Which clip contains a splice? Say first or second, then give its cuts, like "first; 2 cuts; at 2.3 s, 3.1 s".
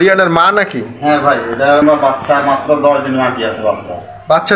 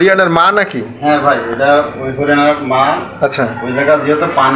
first; 1 cut; at 1.8 s